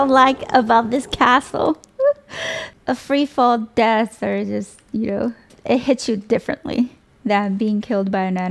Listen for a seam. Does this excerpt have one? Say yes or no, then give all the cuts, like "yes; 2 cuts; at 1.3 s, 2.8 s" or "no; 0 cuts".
no; 0 cuts